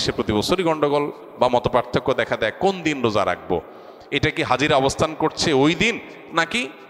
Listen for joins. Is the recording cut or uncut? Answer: uncut